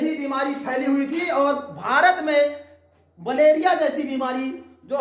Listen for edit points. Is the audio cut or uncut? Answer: uncut